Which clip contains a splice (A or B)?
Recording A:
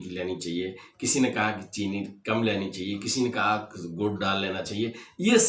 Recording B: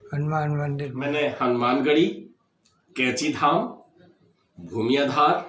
B